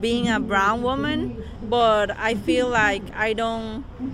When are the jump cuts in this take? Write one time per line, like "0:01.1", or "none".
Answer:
none

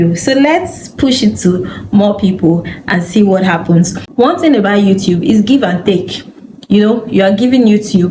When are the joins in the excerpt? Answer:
0:04.0

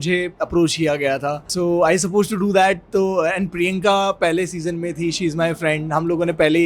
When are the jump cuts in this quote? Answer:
0:01.4

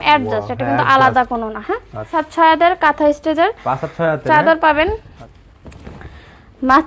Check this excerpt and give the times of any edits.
0:02.2
0:05.1

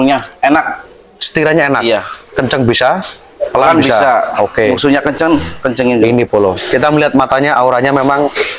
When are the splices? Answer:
none

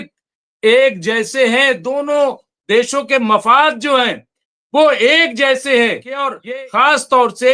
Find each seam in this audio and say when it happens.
0:06.4

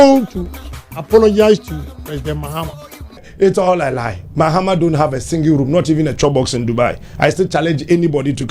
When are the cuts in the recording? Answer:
0:03.2

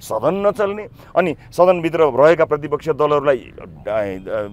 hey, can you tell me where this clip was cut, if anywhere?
none

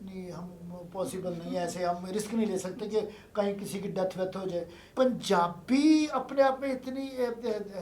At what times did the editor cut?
0:04.8

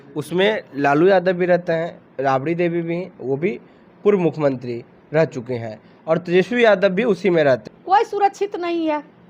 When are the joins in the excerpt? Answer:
0:02.0
0:07.7

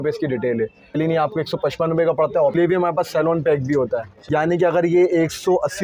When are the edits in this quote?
0:01.0
0:02.5
0:04.1

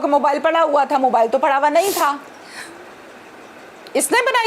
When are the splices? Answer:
none

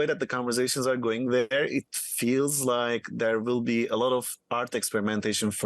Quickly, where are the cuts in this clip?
none

